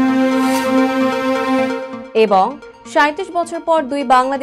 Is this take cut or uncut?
cut